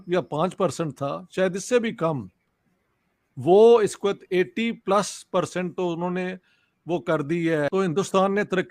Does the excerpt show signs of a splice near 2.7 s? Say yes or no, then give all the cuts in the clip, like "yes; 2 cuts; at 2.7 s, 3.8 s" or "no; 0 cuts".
no; 1 cut; at 7.7 s